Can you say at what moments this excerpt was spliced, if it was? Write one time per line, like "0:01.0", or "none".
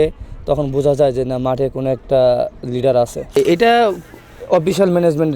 0:03.4